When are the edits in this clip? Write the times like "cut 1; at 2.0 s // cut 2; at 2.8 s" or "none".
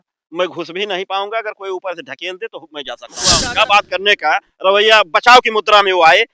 cut 1; at 3.4 s